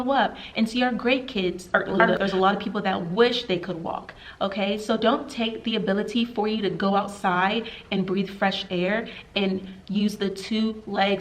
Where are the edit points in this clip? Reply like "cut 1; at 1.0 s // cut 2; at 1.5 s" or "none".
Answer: cut 1; at 2.2 s